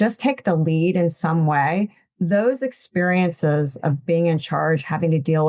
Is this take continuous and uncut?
yes; 0 cuts

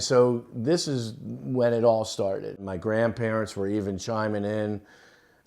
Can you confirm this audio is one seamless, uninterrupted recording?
no; 1 cut; at 2.6 s

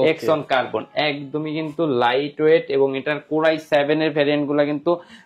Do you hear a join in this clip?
no; 0 cuts

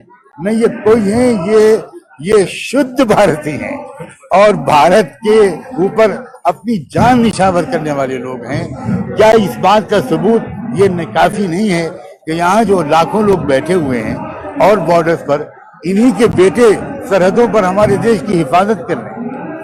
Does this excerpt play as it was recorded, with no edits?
yes; 0 cuts

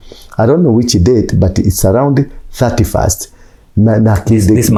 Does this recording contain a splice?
no; 0 cuts

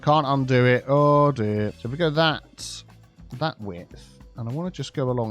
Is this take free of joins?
yes; 0 cuts

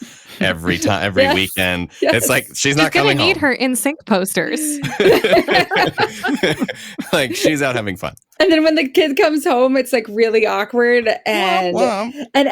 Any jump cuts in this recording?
yes; 1 cut; at 8.2 s

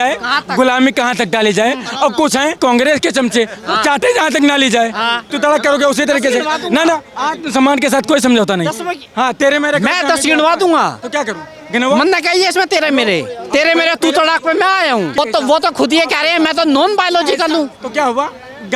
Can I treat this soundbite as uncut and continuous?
no; 3 cuts; at 2.6 s, 5.3 s, 15.2 s

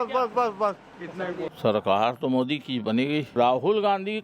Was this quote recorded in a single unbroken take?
no; 2 cuts; at 1.5 s, 3.3 s

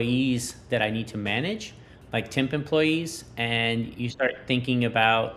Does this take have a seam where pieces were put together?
no; 0 cuts

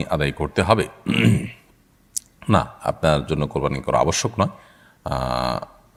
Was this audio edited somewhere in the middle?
no; 0 cuts

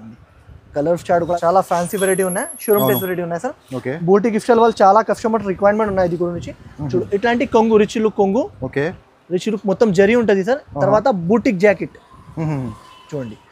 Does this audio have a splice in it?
yes; 1 cut; at 1.4 s

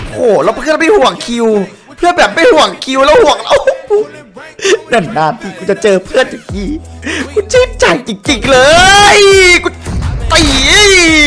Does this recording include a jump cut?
no; 0 cuts

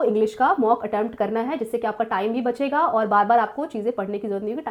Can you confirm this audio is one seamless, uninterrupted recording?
yes; 0 cuts

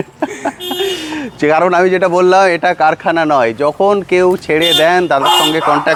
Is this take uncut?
yes; 0 cuts

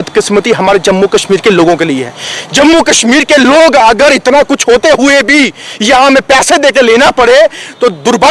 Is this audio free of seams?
yes; 0 cuts

